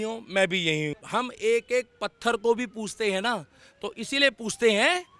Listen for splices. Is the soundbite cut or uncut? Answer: cut